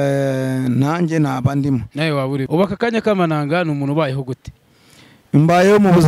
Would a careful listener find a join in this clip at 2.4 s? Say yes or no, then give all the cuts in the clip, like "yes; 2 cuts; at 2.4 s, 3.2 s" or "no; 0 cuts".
yes; 1 cut; at 2.4 s